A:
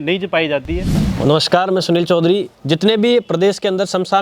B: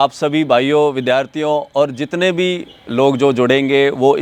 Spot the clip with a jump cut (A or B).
A